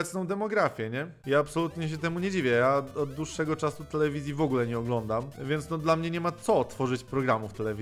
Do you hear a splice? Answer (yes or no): yes